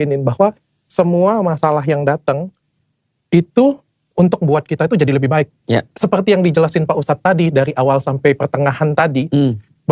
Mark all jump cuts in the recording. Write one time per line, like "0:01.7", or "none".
none